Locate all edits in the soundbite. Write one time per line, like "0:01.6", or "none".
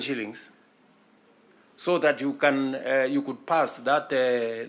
none